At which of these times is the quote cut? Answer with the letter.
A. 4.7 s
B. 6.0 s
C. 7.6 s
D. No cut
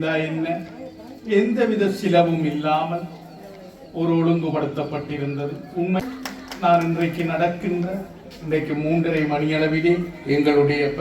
B